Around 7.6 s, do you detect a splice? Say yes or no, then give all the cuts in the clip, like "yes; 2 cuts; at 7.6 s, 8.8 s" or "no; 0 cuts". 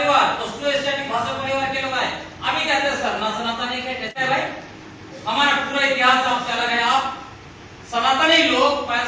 no; 1 cut; at 4.1 s